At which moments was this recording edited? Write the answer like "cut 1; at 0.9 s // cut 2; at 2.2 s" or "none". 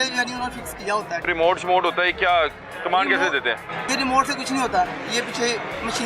cut 1; at 1.3 s // cut 2; at 3.9 s